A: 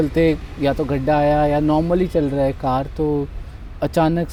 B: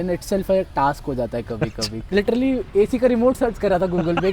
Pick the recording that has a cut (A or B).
B